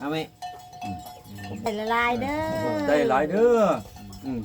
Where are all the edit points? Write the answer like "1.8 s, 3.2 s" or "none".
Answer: 1.7 s